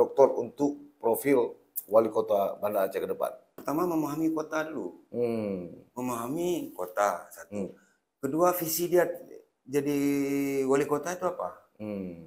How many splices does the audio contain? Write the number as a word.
one